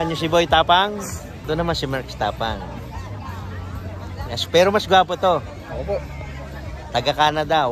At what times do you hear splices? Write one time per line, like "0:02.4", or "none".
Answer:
0:01.4